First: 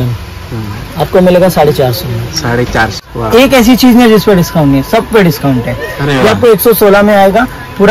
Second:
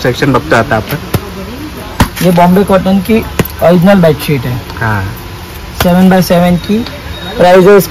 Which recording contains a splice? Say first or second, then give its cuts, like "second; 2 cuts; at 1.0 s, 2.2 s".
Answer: first; 1 cut; at 3.0 s